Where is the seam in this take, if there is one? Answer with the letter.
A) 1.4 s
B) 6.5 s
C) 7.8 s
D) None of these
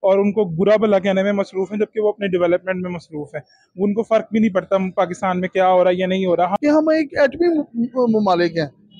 B